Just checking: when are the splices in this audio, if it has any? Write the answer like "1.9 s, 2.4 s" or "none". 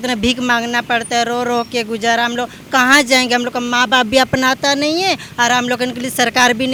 none